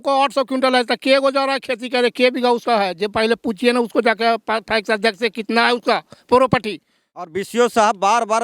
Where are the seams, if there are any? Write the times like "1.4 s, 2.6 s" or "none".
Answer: 7.3 s